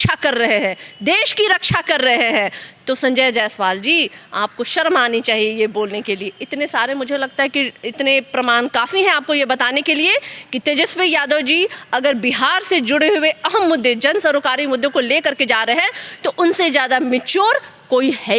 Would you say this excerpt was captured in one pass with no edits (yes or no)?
yes